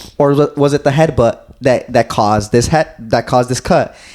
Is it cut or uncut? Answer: uncut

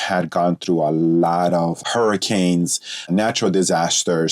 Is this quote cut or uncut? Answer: cut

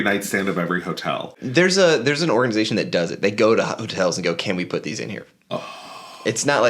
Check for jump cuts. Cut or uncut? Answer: cut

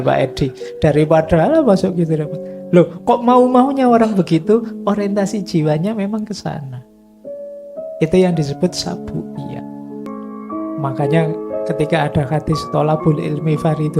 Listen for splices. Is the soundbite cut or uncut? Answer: cut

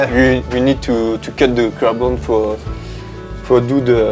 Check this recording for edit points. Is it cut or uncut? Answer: uncut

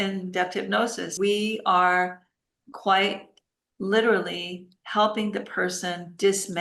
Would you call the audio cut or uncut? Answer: cut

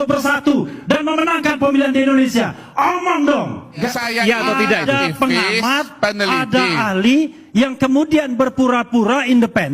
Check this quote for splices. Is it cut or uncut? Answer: cut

